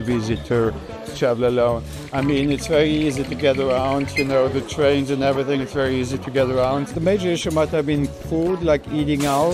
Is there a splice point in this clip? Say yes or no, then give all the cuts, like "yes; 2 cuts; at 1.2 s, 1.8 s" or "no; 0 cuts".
no; 0 cuts